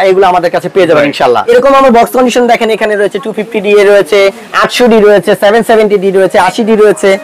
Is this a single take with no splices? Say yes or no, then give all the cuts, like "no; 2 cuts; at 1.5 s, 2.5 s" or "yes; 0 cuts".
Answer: no; 1 cut; at 1.4 s